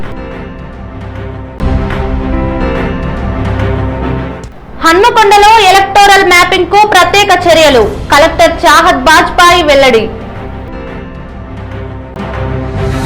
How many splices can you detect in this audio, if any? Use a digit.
1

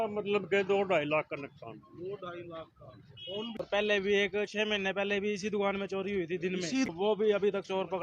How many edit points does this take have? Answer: 2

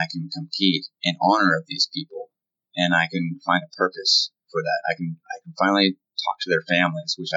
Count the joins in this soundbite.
1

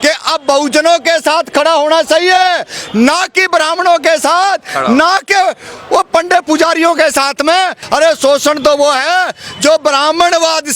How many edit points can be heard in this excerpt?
1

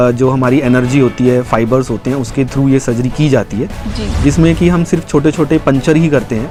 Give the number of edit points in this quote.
0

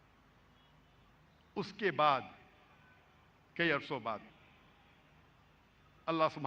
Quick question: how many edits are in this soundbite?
0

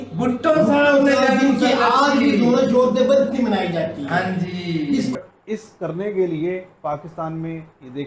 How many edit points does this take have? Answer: 1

